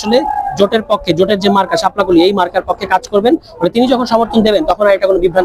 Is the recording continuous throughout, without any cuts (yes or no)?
yes